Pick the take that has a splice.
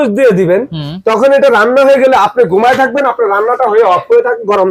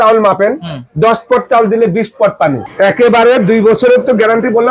second; 1 cut; at 2.6 s

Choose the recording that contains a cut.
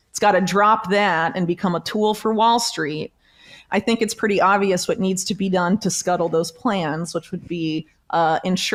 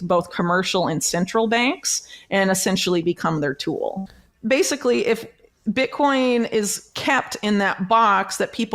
second; 1 cut; at 4.1 s

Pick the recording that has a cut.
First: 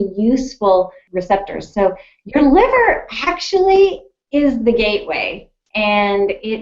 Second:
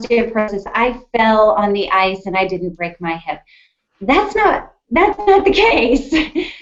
first; 1 cut; at 1.1 s

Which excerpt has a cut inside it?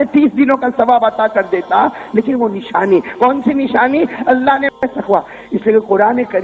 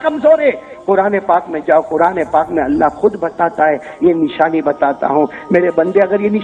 first; 1 cut; at 4.8 s

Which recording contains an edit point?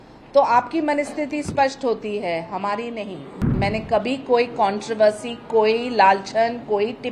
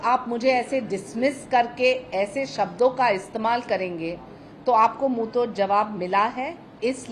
first; 1 cut; at 3.5 s

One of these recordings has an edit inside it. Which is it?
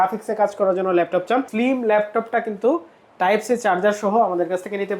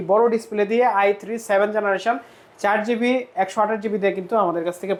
first; 1 cut; at 1.5 s

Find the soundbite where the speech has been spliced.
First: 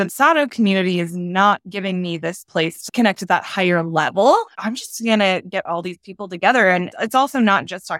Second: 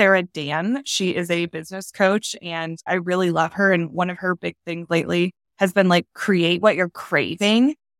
first; 2 cuts; at 2.8 s, 6.9 s

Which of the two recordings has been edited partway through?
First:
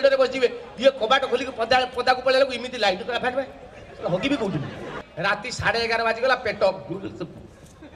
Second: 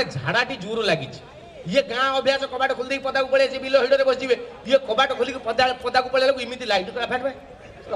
first; 1 cut; at 5.0 s

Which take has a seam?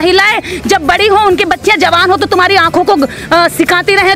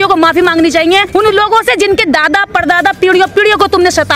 second; 1 cut; at 1.1 s

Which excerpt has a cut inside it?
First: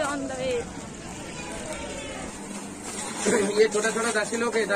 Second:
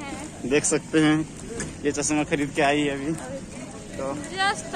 first; 1 cut; at 2.4 s

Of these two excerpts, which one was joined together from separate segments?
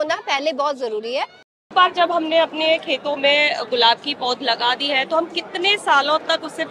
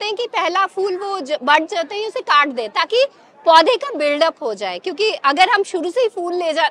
first; 1 cut; at 1.6 s

